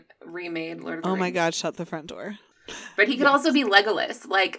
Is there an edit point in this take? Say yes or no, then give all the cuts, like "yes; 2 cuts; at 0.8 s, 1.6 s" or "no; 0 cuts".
yes; 1 cut; at 2.5 s